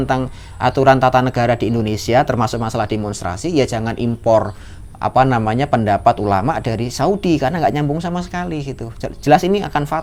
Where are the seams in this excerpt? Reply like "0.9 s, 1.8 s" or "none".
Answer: none